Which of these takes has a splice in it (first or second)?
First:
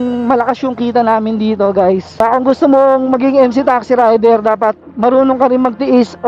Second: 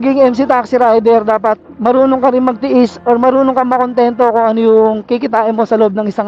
first